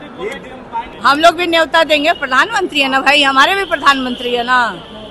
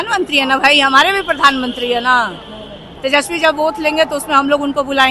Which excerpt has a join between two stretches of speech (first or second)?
first